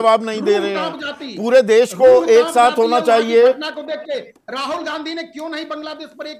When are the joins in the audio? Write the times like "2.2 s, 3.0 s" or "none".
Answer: none